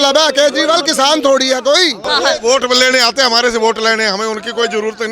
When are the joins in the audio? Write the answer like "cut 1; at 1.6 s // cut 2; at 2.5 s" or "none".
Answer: cut 1; at 2.0 s